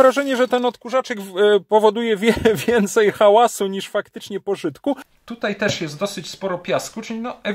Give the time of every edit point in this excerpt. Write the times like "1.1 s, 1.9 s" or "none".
5.1 s